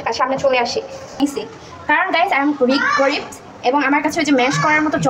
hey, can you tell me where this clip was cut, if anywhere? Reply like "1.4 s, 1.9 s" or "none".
1.2 s